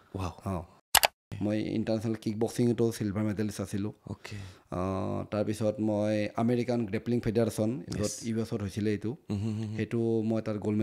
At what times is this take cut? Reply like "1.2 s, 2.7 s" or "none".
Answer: 0.9 s

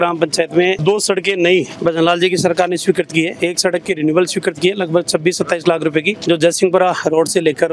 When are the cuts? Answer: none

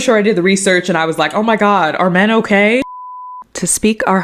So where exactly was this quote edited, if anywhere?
2.8 s

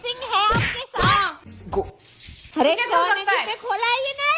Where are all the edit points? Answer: 1.9 s

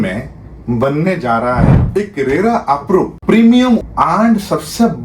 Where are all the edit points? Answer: 3.1 s, 3.9 s

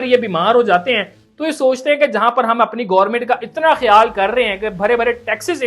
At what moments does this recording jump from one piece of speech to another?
none

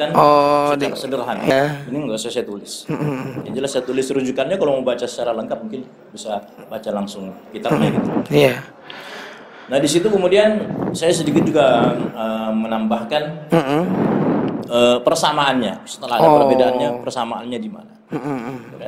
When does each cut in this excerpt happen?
1.5 s

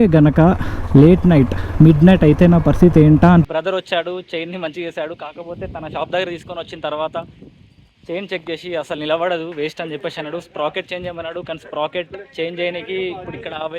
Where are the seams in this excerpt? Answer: none

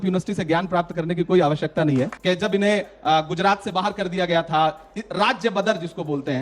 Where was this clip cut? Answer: 2.1 s

